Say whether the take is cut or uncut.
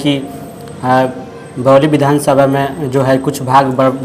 uncut